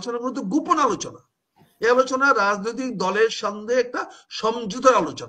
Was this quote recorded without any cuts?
yes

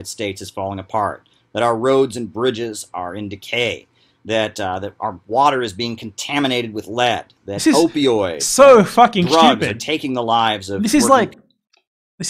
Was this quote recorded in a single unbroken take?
yes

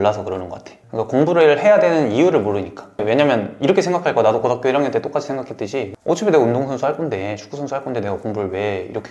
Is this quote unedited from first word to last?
no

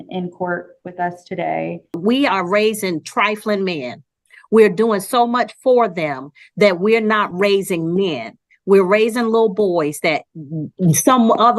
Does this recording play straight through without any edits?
no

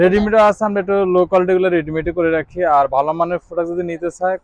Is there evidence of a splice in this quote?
no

